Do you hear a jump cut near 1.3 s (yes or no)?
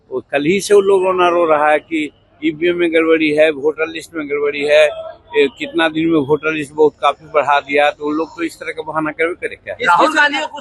no